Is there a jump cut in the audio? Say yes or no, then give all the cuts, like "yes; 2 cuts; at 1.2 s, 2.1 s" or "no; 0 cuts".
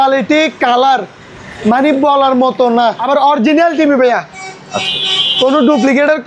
yes; 1 cut; at 3.0 s